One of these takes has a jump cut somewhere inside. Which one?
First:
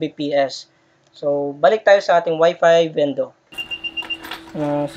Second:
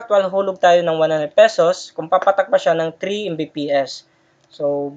first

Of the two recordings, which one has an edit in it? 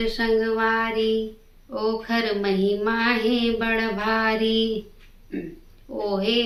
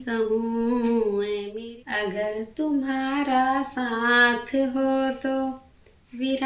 second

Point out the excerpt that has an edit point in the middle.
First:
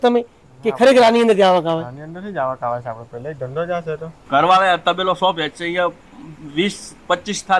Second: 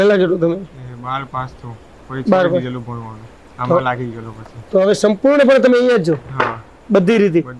first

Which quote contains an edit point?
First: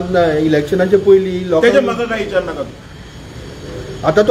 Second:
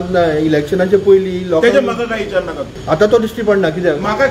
second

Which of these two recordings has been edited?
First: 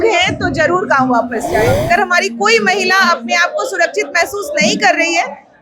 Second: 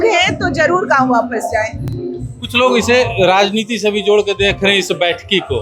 first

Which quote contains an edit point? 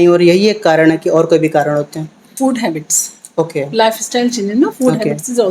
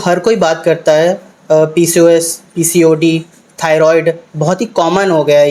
first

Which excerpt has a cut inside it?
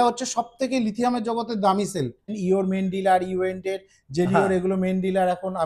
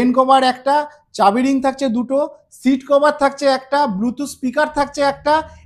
first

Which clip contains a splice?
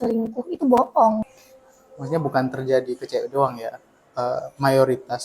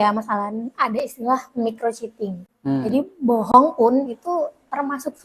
first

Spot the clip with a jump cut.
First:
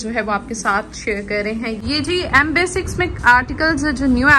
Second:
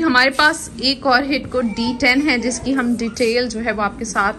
first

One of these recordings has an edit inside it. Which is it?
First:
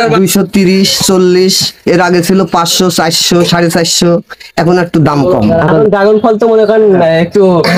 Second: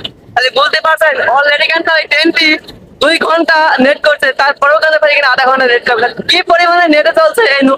first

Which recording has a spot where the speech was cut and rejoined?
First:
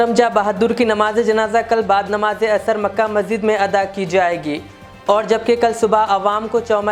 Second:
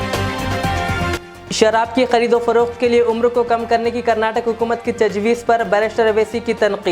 second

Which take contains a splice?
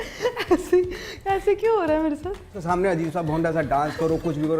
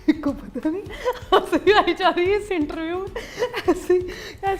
first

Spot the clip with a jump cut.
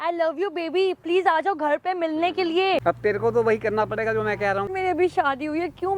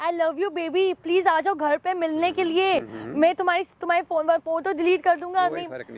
first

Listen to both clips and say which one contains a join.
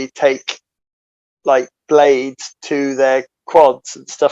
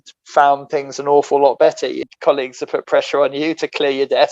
second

